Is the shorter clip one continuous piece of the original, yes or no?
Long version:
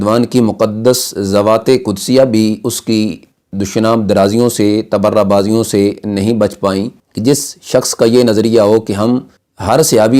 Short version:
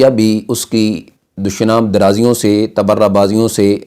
yes